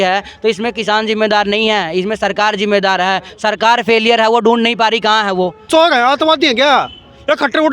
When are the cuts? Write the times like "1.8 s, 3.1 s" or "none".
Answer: 5.7 s